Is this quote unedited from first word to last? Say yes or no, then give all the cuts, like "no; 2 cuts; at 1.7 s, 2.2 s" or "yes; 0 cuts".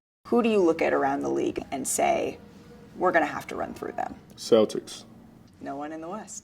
no; 1 cut; at 1.6 s